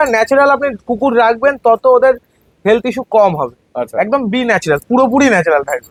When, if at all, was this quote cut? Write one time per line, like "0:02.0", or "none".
none